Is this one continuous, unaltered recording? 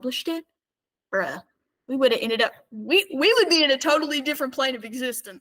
yes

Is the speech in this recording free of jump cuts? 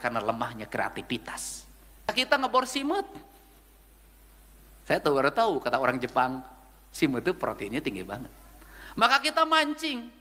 no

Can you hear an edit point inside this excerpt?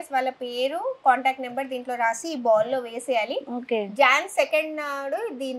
no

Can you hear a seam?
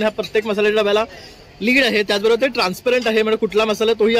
no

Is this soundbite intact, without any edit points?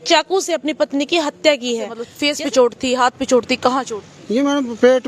no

